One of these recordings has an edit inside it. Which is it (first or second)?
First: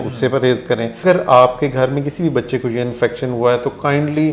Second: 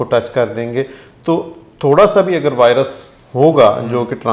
first